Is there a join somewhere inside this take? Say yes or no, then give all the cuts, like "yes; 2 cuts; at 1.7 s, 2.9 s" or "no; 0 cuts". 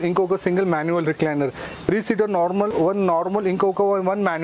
no; 0 cuts